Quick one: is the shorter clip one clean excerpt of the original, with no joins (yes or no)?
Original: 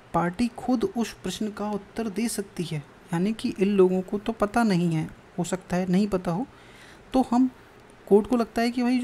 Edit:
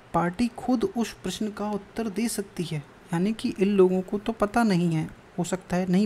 yes